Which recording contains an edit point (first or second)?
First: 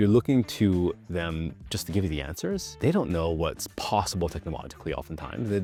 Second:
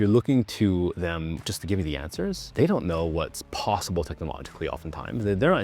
second